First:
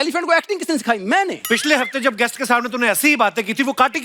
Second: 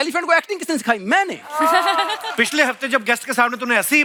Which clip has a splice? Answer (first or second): first